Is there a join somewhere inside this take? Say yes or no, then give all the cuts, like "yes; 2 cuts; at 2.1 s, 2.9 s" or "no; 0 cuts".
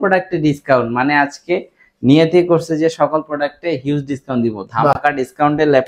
no; 0 cuts